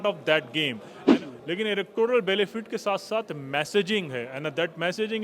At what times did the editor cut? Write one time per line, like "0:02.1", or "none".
0:01.0